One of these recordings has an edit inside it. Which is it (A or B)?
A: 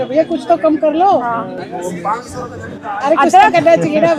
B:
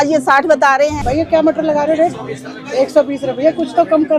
B